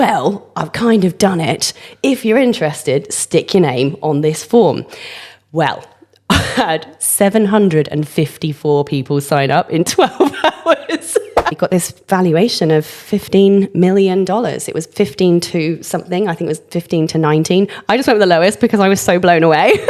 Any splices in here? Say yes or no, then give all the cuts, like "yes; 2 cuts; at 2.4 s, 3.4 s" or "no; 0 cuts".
yes; 1 cut; at 11.6 s